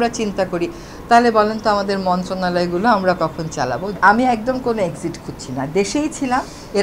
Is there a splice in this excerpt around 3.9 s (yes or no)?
yes